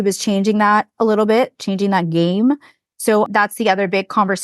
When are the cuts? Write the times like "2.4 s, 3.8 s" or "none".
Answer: 3.3 s